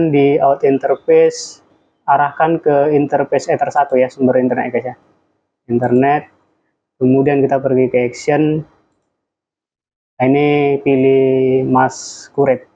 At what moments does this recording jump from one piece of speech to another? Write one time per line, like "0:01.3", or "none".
none